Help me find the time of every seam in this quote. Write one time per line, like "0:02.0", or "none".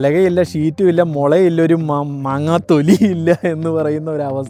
none